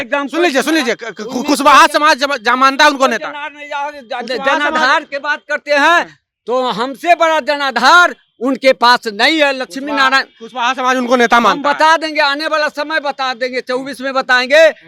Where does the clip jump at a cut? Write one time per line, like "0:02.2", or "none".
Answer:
none